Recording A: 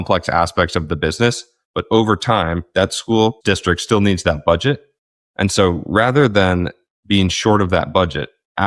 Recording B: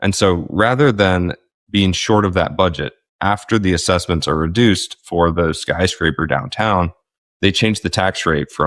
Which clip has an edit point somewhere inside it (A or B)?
A